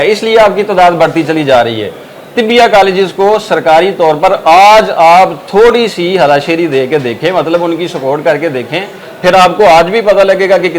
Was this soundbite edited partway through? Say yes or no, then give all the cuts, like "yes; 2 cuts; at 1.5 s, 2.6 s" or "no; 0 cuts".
no; 0 cuts